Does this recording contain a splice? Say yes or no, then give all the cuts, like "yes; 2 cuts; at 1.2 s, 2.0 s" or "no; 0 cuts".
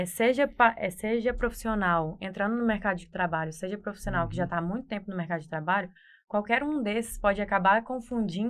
no; 0 cuts